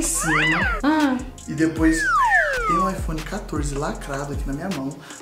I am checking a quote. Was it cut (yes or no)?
yes